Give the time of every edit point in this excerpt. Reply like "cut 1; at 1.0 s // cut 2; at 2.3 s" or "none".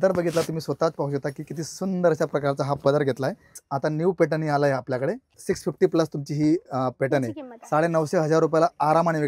cut 1; at 3.6 s // cut 2; at 5.3 s